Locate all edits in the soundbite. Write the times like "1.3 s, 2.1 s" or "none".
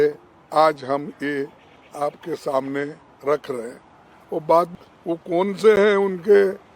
4.7 s